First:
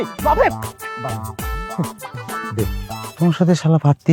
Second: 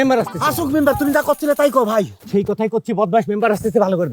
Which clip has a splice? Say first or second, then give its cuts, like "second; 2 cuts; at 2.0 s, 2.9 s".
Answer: first; 1 cut; at 3.1 s